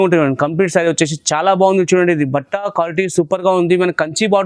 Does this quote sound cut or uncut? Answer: uncut